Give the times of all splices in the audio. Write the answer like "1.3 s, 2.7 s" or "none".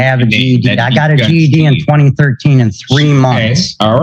none